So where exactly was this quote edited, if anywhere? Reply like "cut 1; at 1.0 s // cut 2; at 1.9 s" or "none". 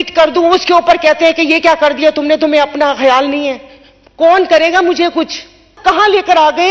cut 1; at 5.7 s

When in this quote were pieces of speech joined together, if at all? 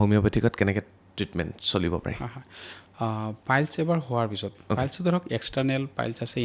none

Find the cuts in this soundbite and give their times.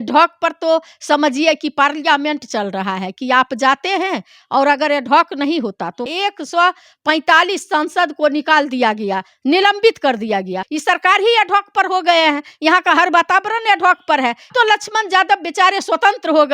cut 1; at 6.1 s // cut 2; at 10.7 s // cut 3; at 14.4 s

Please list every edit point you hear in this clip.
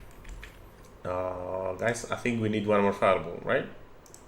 none

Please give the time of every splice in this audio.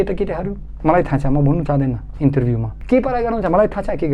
cut 1; at 2.8 s

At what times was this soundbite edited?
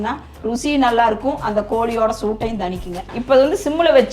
cut 1; at 3.1 s

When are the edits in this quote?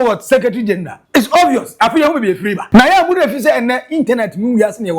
cut 1; at 1.0 s // cut 2; at 2.6 s

